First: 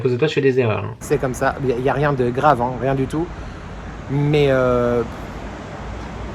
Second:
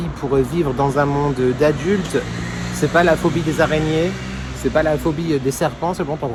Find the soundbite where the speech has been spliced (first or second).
first